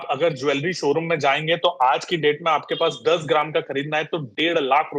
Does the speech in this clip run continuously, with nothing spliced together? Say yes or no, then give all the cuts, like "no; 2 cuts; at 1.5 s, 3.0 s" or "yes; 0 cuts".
yes; 0 cuts